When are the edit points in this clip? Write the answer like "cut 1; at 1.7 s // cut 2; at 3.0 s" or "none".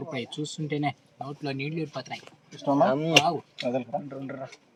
none